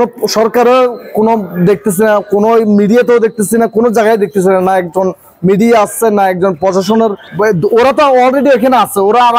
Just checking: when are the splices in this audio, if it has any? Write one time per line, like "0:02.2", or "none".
0:07.2